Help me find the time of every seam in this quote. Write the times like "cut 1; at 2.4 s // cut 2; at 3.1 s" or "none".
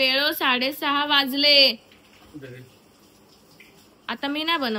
none

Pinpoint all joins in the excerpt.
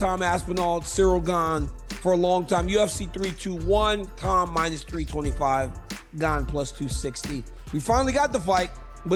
none

